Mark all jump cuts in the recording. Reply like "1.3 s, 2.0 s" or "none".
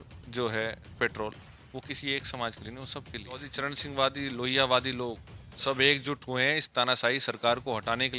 3.5 s

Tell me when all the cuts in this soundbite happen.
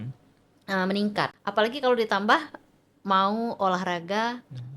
1.4 s

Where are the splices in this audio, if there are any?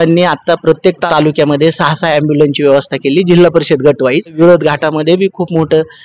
1.0 s, 4.3 s

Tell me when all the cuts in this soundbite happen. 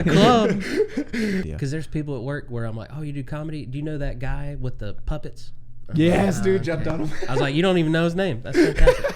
1.5 s

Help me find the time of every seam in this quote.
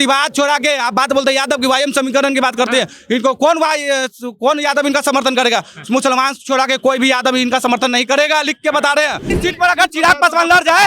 9.3 s

